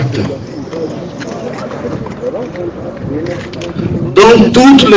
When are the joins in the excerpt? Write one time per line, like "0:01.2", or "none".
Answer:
0:03.8